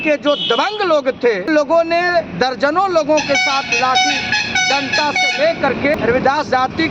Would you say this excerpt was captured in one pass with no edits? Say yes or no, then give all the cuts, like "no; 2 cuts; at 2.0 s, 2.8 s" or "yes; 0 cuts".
no; 2 cuts; at 1.5 s, 6.0 s